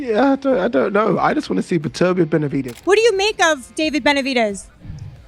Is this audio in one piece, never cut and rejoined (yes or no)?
no